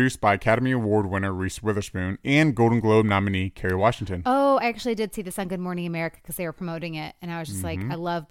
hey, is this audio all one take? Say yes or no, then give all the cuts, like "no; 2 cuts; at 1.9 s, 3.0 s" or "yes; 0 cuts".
yes; 0 cuts